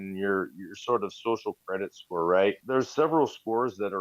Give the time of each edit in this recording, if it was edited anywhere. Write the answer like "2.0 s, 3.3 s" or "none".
2.6 s